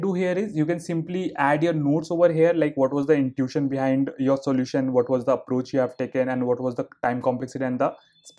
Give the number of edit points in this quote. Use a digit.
0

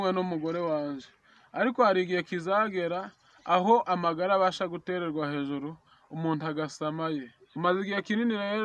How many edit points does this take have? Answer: 1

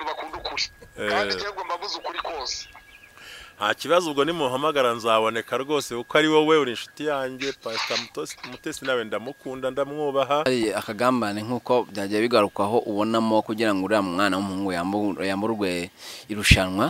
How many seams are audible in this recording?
1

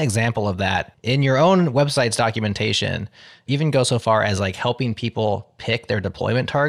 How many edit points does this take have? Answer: 1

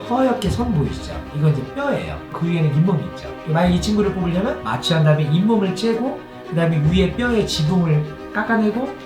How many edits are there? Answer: 0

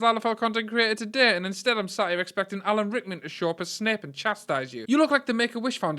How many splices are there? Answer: 1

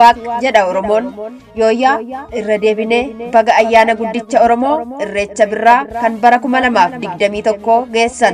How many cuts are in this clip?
0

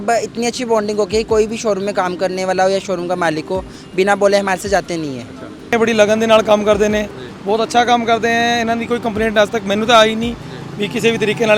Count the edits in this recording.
1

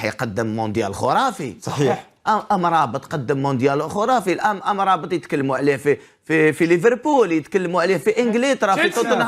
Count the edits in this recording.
0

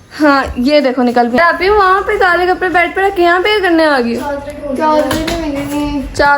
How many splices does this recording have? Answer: 1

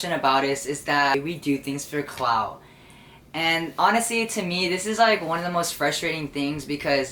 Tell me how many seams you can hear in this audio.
1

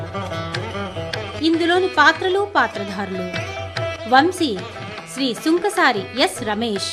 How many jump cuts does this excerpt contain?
1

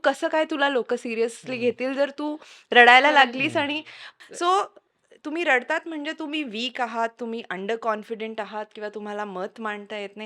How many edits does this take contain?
1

